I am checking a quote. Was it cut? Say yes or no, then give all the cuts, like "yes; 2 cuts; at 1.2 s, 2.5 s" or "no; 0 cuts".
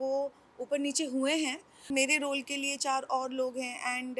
yes; 1 cut; at 1.9 s